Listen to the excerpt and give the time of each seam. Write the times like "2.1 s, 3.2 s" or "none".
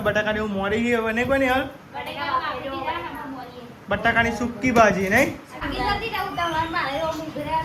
5.6 s